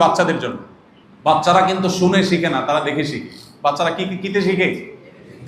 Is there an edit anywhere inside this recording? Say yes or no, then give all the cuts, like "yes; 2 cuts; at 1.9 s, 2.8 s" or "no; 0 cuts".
no; 0 cuts